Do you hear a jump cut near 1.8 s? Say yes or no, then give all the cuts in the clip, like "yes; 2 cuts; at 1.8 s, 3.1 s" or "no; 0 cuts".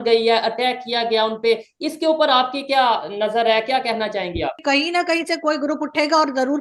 no; 1 cut; at 4.6 s